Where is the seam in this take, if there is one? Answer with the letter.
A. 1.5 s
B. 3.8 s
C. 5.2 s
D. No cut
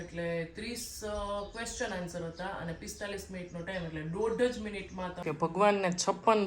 C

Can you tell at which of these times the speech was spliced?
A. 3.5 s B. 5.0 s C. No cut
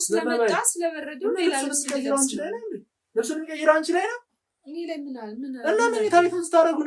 C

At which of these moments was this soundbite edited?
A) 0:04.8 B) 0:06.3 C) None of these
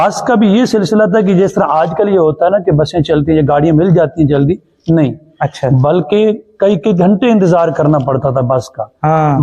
C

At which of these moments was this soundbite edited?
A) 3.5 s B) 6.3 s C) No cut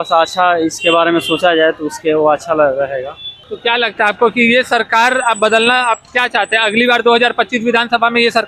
A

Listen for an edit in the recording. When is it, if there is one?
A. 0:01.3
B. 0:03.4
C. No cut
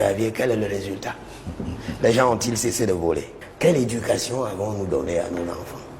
B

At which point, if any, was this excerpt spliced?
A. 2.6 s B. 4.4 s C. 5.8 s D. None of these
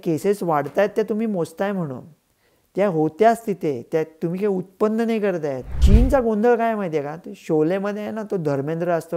C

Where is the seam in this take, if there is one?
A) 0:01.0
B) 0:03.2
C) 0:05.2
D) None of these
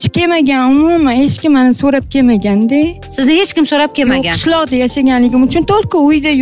D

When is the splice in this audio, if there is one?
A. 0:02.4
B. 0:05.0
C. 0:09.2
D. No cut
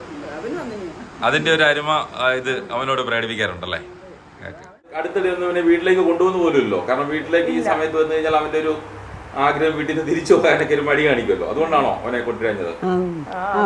B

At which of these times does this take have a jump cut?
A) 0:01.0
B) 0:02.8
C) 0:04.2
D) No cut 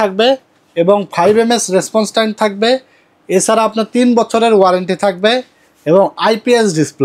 D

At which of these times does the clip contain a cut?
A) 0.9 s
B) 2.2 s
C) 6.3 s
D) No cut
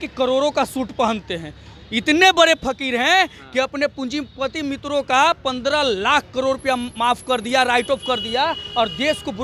D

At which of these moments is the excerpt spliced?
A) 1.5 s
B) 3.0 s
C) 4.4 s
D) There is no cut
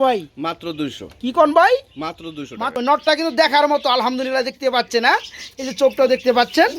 B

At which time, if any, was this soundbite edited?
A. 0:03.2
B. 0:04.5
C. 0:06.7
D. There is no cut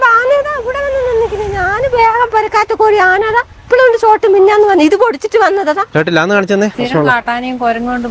C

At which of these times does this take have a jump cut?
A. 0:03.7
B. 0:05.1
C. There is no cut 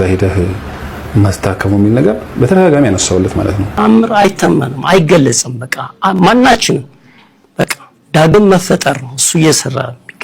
A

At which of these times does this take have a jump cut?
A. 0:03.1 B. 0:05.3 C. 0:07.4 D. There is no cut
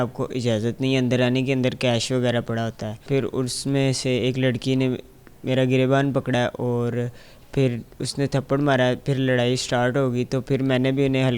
A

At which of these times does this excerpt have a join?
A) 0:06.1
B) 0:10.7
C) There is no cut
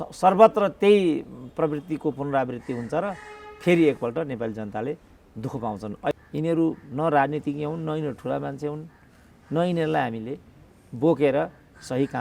A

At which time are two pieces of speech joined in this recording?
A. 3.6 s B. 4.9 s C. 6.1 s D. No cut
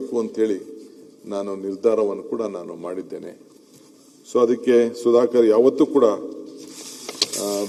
D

